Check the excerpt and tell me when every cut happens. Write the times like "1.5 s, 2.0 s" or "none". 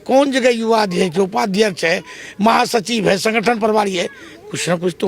none